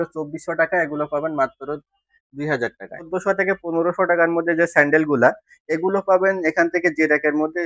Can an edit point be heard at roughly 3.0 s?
yes; 1 cut; at 3.0 s

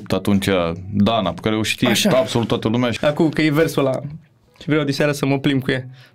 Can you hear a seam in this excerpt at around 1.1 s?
no; 1 cut; at 2.9 s

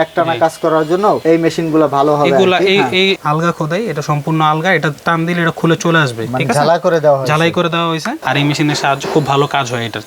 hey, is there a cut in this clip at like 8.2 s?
yes; 2 cuts; at 3.2 s, 8.2 s

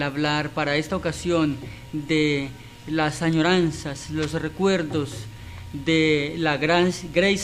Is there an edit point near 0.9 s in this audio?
yes; 1 cut; at 0.9 s

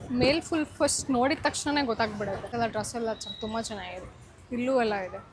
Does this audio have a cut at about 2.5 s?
yes; 1 cut; at 2.5 s

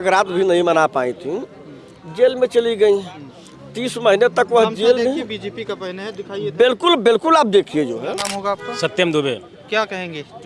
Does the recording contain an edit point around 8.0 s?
yes; 1 cut; at 8.0 s

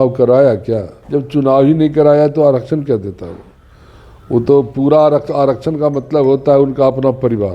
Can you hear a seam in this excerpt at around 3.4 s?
no; 1 cut; at 0.9 s

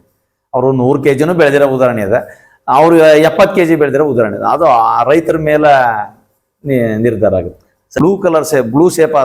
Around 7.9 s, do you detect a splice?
yes; 1 cut; at 7.9 s

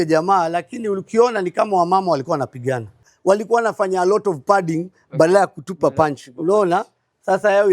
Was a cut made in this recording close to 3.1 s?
yes; 1 cut; at 3.1 s

